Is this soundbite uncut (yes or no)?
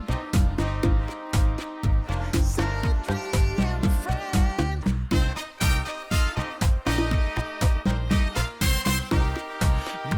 no